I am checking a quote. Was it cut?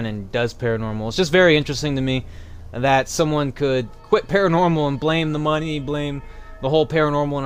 no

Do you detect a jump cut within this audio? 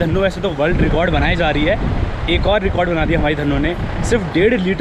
no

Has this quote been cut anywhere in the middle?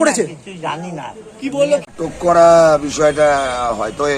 yes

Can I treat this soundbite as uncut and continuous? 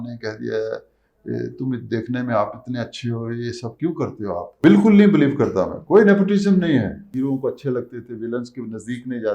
no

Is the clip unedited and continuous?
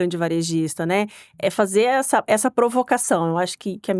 yes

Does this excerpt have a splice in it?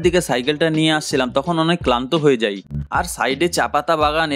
yes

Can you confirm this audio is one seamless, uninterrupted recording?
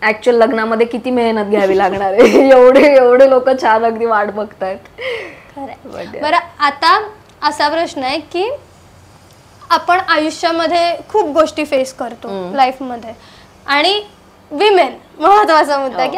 yes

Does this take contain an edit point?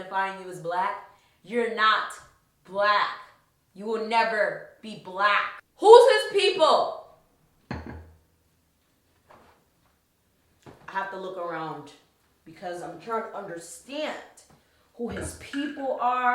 yes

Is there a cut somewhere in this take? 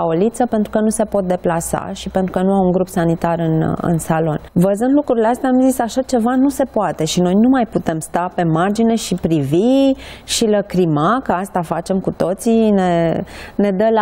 yes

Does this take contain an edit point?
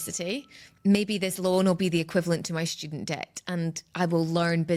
no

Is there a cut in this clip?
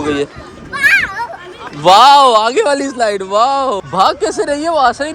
yes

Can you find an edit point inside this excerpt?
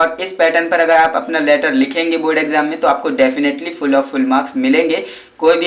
no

